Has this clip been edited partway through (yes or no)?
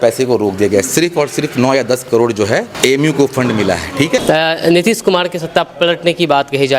yes